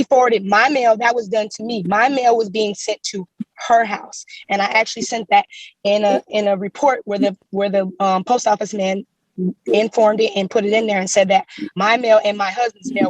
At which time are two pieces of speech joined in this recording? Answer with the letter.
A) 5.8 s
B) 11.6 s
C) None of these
B